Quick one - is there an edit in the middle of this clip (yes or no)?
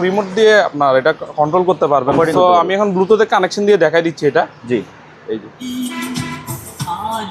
no